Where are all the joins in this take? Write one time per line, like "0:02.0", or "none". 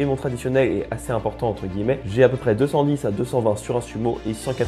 0:02.0